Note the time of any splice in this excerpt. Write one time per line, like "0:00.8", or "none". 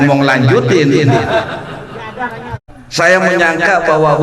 0:02.8